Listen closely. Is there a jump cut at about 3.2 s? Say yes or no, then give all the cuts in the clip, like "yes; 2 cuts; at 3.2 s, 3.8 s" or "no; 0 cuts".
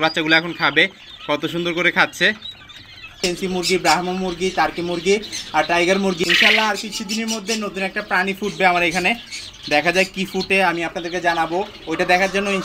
yes; 2 cuts; at 3.2 s, 6.2 s